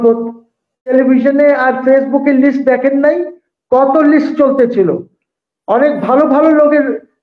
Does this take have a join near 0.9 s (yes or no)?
yes